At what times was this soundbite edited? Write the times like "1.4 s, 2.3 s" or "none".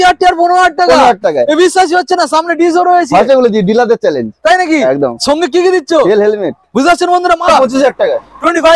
7.4 s